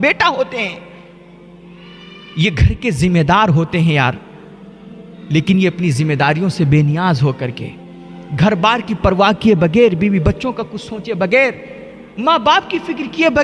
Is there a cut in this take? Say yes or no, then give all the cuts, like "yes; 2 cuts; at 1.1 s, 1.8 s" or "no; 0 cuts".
no; 0 cuts